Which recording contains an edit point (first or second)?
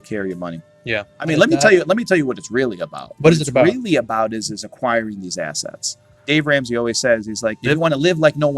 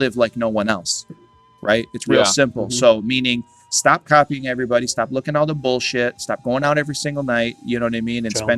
first